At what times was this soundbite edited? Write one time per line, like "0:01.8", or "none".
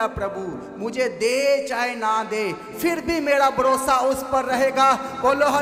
none